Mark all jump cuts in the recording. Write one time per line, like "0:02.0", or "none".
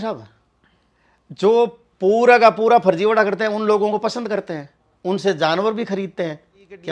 none